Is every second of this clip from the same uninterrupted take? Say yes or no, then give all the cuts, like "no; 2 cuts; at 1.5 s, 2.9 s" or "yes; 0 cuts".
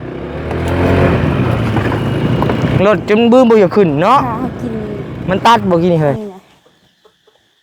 no; 1 cut; at 6.2 s